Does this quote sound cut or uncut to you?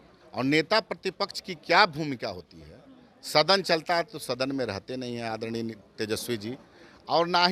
uncut